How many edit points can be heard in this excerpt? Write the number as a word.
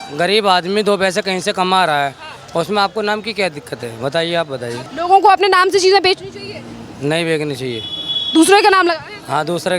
one